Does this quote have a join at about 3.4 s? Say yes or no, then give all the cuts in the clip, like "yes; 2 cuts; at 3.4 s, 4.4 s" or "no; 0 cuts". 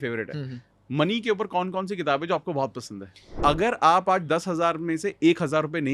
yes; 1 cut; at 3.4 s